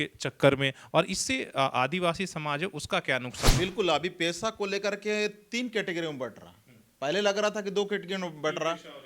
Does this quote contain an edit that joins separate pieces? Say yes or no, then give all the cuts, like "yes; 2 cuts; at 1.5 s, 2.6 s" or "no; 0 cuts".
yes; 1 cut; at 3.5 s